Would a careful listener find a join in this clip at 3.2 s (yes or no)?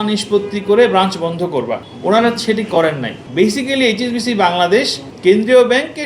yes